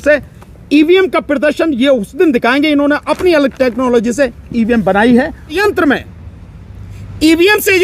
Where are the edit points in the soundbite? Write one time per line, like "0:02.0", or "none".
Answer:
0:05.6

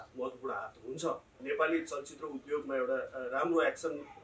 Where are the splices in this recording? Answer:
0:01.3

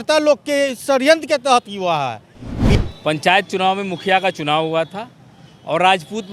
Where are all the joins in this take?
0:02.7

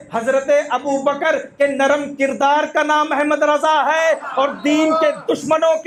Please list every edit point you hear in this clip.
none

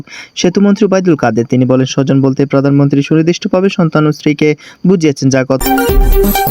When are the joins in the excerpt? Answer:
0:05.6

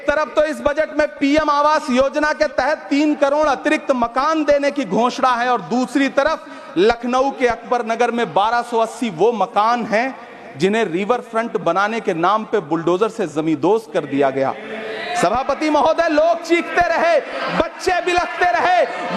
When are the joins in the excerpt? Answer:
none

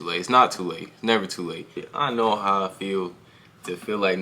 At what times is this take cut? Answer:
0:01.8

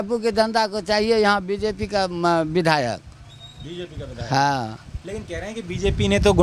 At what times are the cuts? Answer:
none

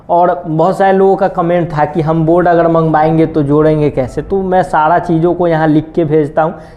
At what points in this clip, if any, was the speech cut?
none

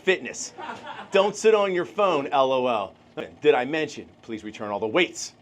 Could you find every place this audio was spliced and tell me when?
0:03.3

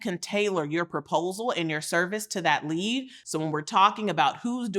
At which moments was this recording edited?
0:03.2

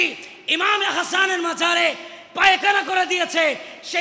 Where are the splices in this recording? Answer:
none

